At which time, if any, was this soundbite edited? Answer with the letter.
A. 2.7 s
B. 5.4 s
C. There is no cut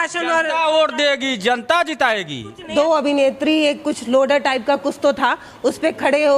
A